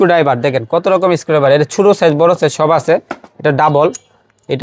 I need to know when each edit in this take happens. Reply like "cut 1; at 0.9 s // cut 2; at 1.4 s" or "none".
none